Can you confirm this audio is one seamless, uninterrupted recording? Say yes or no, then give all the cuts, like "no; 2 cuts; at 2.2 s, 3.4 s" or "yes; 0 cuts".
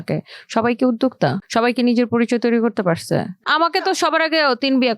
no; 2 cuts; at 1.4 s, 3.5 s